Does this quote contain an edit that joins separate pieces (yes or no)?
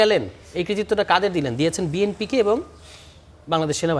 no